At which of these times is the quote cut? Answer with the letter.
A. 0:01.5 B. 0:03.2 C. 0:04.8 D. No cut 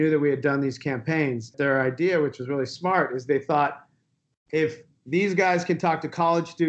A